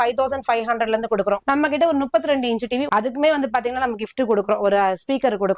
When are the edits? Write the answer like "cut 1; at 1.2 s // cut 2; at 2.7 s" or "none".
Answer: cut 1; at 1.4 s // cut 2; at 2.9 s